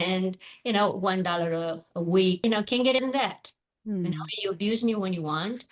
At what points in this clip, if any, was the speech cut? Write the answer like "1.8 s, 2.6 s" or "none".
none